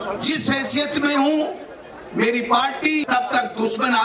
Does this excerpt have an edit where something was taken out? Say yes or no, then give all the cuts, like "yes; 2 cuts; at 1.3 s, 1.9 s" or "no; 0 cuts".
yes; 1 cut; at 3.0 s